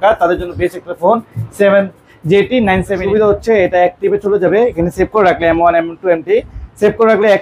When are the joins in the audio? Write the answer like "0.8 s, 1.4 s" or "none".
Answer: 3.0 s